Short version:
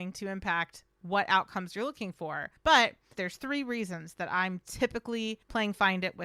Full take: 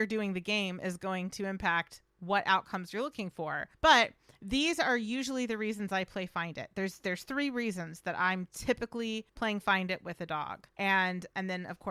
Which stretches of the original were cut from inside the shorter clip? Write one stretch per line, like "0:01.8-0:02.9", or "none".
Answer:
0:04.3-0:07.0